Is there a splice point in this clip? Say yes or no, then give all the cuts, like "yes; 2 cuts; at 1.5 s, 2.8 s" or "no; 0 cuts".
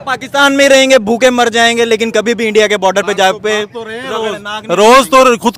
no; 0 cuts